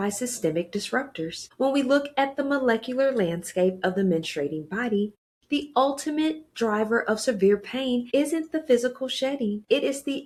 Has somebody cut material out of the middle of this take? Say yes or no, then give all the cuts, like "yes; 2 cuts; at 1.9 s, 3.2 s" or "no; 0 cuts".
no; 0 cuts